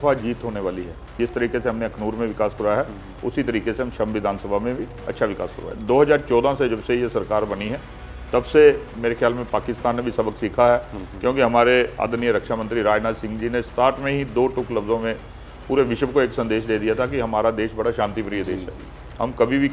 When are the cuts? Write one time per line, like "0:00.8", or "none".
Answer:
0:01.2
0:05.6